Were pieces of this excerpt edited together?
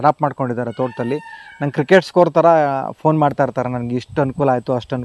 no; 0 cuts

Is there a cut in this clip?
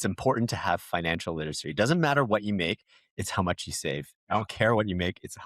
yes; 1 cut; at 4.1 s

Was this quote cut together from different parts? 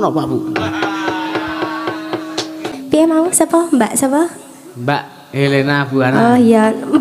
yes; 1 cut; at 2.7 s

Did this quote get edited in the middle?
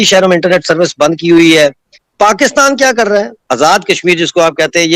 yes; 1 cut; at 2.1 s

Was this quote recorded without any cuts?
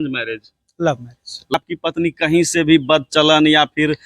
no; 1 cut; at 1.5 s

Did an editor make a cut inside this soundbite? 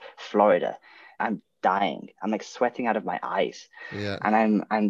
yes; 1 cut; at 1.2 s

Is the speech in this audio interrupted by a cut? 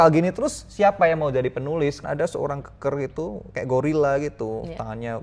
yes; 1 cut; at 2.0 s

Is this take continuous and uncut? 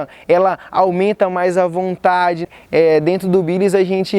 no; 1 cut; at 2.5 s

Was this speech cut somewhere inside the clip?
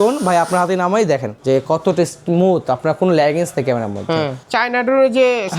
yes; 2 cuts; at 1.3 s, 4.4 s

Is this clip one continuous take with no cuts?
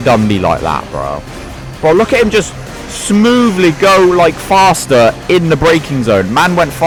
yes; 0 cuts

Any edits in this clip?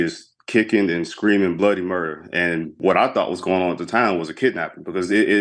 yes; 1 cut; at 2.8 s

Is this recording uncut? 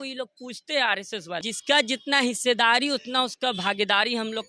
no; 1 cut; at 1.4 s

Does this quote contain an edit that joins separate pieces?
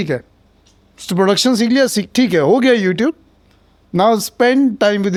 no; 0 cuts

